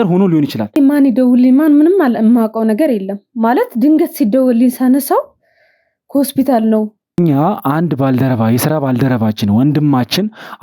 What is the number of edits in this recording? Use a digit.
2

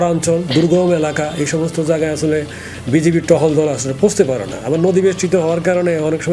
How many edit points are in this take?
0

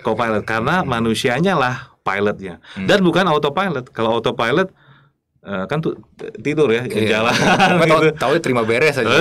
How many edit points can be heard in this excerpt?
0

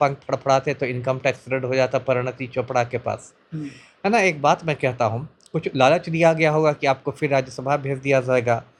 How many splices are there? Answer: 0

